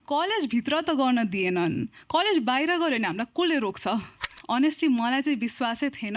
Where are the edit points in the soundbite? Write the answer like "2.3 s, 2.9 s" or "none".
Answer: 4.3 s